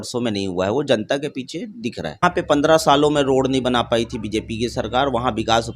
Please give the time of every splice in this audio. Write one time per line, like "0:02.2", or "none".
0:02.2